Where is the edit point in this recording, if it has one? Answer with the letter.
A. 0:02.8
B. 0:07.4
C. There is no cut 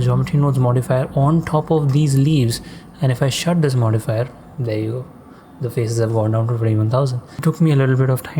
B